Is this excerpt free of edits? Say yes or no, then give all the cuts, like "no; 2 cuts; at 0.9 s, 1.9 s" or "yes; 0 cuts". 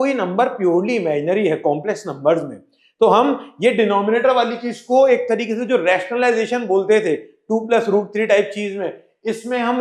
yes; 0 cuts